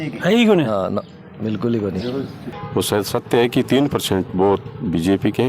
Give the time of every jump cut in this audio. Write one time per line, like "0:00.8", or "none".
0:02.5